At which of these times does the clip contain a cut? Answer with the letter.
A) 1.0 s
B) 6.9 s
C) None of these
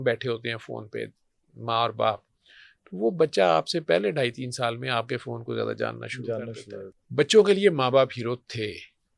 B